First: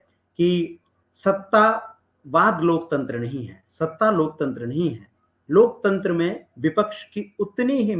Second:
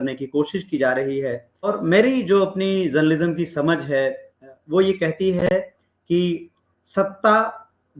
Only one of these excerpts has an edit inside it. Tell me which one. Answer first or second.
second